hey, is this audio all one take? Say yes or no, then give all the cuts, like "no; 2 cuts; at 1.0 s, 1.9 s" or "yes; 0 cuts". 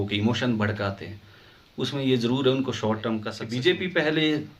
no; 1 cut; at 3.4 s